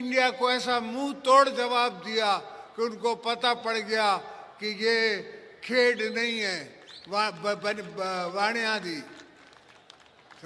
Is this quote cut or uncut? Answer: uncut